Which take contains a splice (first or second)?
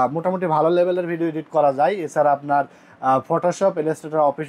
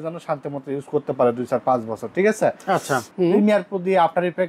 second